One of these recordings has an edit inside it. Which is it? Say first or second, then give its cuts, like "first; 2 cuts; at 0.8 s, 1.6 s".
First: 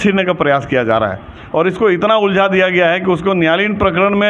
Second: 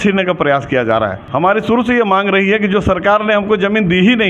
second; 1 cut; at 1.2 s